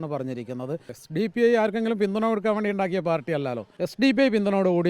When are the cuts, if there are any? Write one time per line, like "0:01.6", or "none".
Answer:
0:01.0
0:03.6